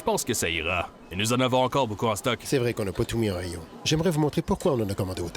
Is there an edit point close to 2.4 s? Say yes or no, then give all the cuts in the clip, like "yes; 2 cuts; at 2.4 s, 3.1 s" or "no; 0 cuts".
yes; 1 cut; at 2.4 s